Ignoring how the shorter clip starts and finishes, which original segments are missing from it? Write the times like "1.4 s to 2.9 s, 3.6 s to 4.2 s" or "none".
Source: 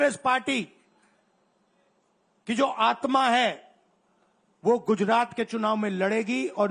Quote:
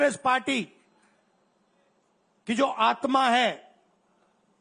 none